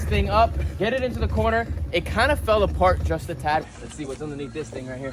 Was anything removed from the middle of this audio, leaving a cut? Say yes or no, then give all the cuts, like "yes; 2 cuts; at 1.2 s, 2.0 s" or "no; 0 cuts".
yes; 1 cut; at 3.6 s